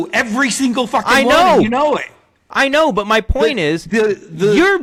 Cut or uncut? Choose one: uncut